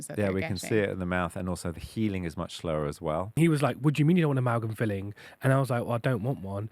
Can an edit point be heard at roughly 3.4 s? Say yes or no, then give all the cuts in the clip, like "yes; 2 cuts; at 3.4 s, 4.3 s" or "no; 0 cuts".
yes; 1 cut; at 3.4 s